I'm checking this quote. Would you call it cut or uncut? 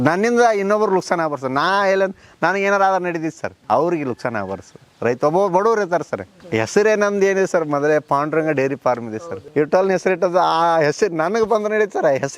cut